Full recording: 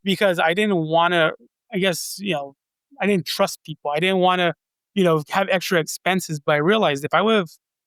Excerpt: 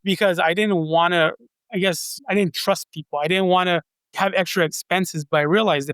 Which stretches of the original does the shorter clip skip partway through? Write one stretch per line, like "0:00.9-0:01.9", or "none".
0:02.1-0:02.8
0:04.8-0:05.3

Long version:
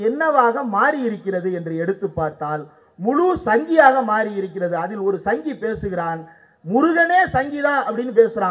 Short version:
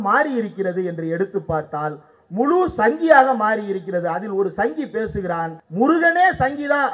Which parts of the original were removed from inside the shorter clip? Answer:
0:06.3-0:06.5

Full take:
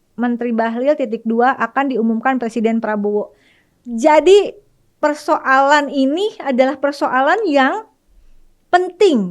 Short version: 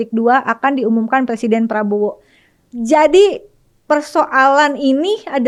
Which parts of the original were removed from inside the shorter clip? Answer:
none

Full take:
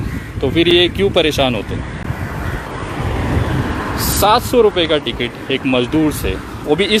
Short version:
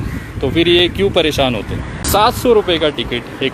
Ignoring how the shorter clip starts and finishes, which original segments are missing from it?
0:02.0-0:04.0

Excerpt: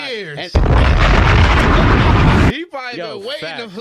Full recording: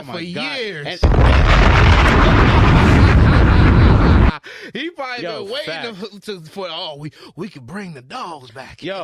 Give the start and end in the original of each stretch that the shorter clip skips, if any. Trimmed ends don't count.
0:03.0-0:04.8

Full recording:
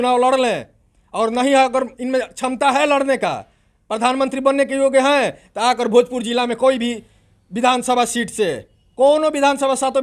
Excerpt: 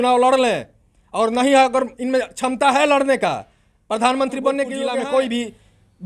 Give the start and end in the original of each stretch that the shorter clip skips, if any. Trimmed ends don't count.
0:04.7-0:06.2

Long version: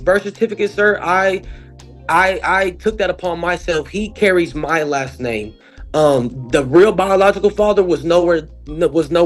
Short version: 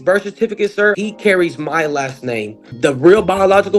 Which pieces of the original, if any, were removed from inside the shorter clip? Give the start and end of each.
0:01.0-0:04.0
0:05.6-0:06.4

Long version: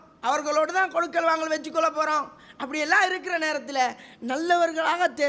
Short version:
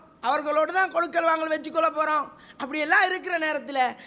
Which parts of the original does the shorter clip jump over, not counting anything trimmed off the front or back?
none

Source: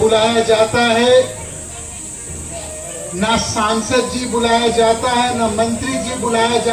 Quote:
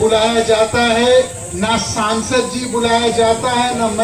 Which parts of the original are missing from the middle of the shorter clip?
0:01.4-0:03.0

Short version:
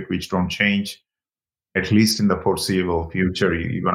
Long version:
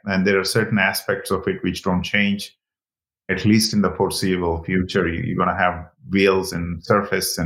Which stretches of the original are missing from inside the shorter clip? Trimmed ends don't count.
none

